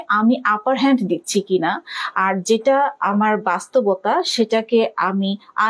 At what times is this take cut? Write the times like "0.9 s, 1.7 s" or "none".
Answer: none